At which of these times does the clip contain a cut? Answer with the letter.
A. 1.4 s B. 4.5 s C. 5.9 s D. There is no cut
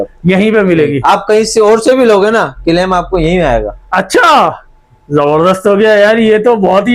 D